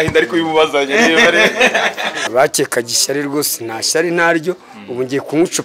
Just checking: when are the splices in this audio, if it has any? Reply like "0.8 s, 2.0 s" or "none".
2.1 s

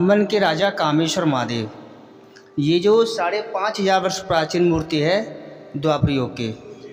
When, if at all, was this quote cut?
none

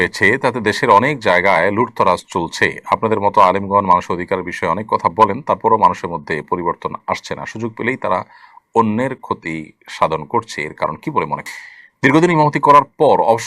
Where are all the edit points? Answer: 11.4 s

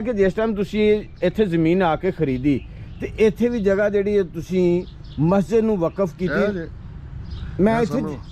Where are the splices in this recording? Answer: none

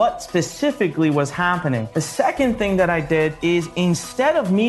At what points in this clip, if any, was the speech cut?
1.9 s, 3.4 s

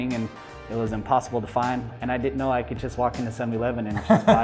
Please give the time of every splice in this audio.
1.9 s

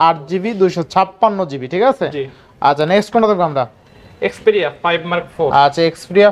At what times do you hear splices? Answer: none

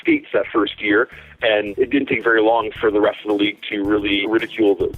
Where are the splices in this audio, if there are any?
1.7 s, 4.2 s

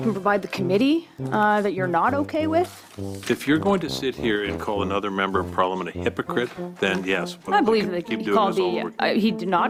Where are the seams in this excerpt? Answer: none

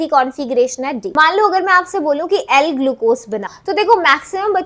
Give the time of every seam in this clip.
1.0 s, 3.5 s

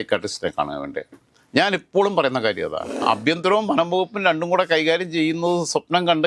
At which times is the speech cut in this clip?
3.0 s

